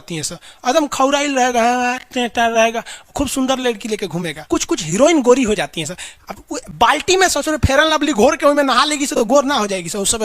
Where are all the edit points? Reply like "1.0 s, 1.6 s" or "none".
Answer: 4.4 s

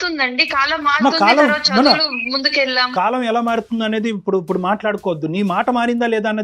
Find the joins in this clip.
2.9 s

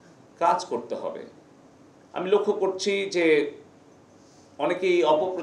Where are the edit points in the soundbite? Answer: none

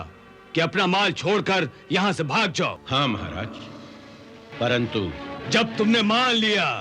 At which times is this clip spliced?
2.8 s, 4.5 s

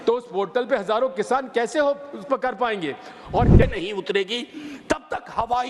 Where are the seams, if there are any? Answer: 3.6 s

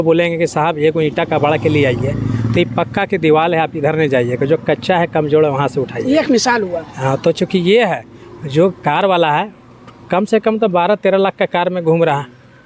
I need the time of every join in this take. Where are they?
none

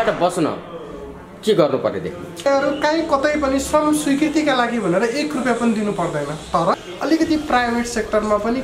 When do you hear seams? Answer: 2.5 s, 6.7 s

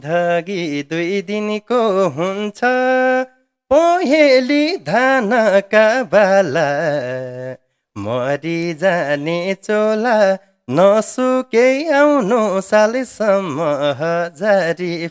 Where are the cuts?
none

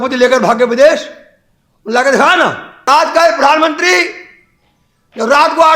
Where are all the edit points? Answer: 2.9 s

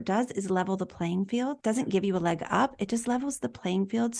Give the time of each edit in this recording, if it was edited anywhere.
1.6 s

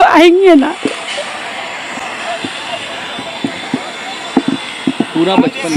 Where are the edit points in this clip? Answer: none

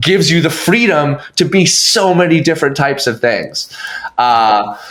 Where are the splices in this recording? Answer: none

